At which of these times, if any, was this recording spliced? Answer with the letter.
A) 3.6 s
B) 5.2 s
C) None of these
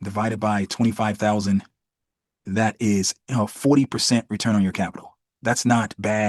C